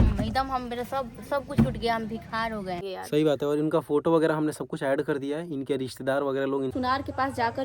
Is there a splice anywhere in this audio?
yes; 2 cuts; at 2.8 s, 6.7 s

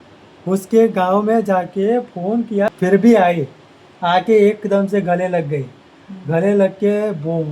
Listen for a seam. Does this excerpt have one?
yes; 1 cut; at 2.7 s

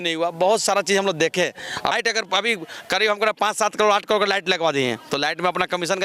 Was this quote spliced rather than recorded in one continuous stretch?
yes; 1 cut; at 1.9 s

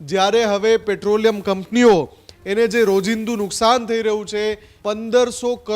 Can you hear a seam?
yes; 1 cut; at 4.7 s

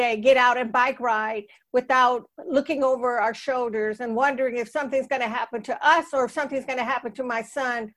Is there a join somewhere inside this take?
no; 0 cuts

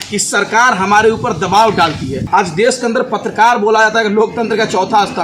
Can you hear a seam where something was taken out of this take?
yes; 1 cut; at 2.2 s

